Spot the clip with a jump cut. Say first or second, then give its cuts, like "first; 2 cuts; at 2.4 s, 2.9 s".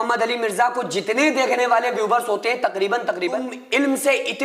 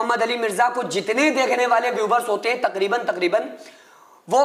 first; 1 cut; at 3.5 s